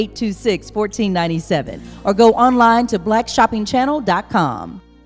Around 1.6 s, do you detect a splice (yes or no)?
yes